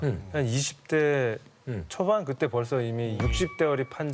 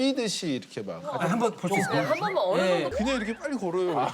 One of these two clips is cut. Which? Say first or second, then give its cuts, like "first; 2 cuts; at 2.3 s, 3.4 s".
second; 1 cut; at 3.0 s